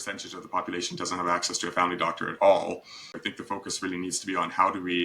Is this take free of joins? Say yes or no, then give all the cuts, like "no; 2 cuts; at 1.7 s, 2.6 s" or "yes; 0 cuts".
no; 1 cut; at 3.3 s